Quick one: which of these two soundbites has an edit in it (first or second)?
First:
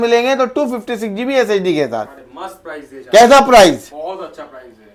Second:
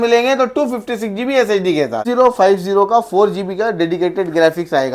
second